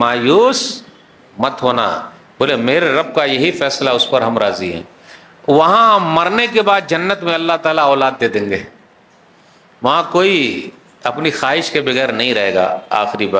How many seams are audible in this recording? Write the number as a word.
zero